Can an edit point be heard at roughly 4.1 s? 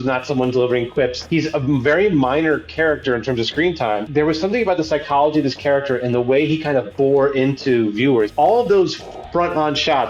yes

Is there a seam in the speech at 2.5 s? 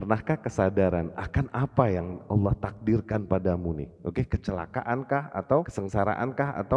no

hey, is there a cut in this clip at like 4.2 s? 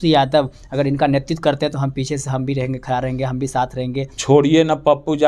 yes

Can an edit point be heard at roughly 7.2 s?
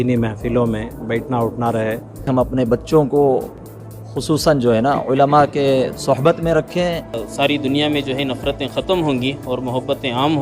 yes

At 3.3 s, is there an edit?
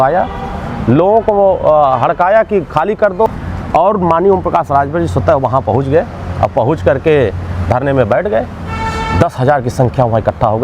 yes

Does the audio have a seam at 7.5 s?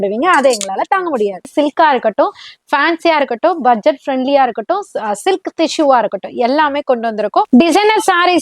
yes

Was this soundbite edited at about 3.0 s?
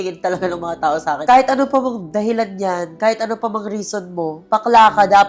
no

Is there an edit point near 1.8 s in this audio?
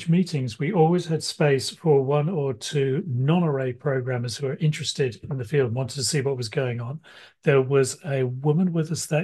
no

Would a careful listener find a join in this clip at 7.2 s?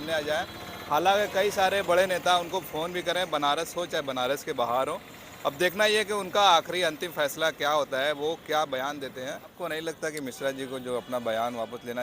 no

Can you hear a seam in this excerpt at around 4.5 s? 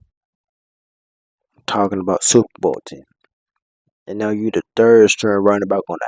no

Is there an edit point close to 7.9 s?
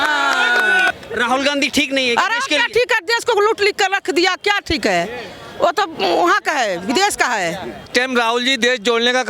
yes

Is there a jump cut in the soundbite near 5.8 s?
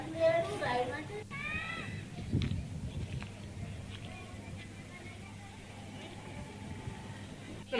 yes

